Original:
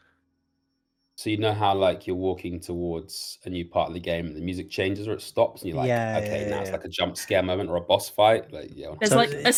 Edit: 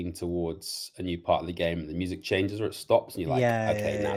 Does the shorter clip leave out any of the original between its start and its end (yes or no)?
no